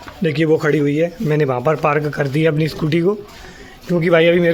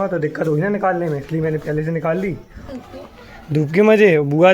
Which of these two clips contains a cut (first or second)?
second